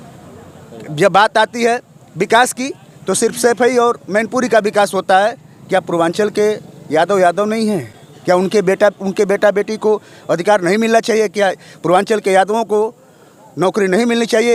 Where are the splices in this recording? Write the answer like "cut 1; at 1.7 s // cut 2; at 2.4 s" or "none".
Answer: none